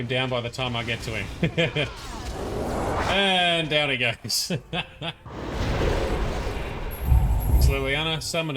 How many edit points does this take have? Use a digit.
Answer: 1